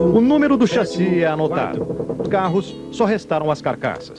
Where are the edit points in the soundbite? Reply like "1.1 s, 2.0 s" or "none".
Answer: none